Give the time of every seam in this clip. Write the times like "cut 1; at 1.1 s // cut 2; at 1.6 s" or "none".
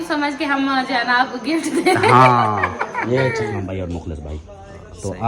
cut 1; at 3.6 s